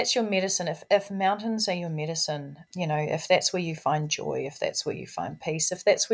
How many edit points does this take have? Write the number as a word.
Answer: one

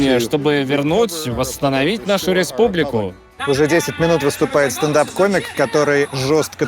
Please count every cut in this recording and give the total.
one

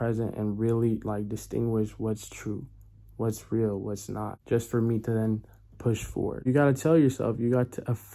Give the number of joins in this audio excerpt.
two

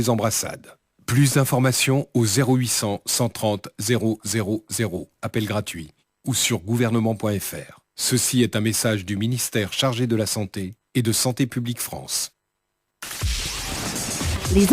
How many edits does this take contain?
one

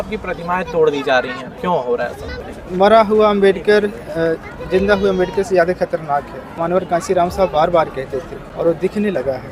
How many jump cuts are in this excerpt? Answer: four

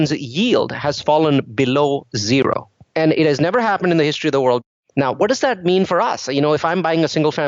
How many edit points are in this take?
two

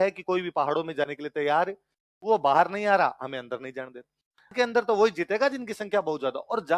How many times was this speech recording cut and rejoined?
one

